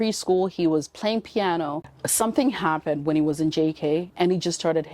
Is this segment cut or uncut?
cut